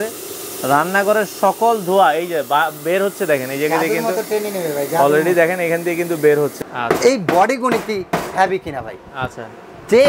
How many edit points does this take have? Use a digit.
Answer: 1